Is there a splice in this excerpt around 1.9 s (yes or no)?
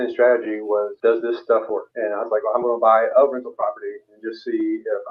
yes